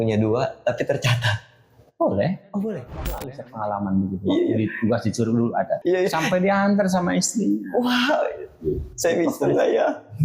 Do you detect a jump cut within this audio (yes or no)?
yes